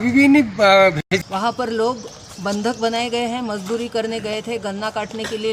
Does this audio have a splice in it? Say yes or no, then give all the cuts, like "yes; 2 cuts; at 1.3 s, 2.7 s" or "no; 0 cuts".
yes; 1 cut; at 1.0 s